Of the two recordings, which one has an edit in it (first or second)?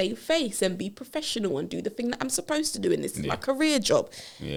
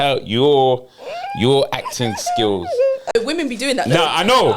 second